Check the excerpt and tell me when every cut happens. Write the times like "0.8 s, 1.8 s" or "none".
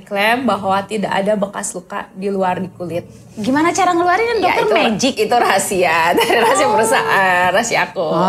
none